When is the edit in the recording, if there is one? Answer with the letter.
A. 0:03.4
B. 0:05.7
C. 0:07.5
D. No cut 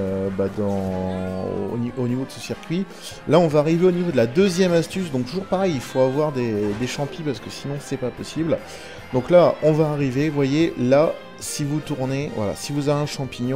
A